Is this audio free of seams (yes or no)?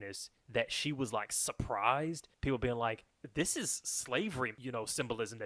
no